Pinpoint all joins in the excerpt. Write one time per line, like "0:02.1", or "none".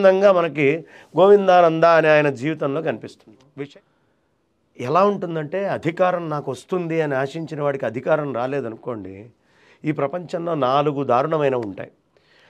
0:03.5